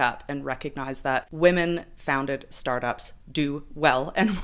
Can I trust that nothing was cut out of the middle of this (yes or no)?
no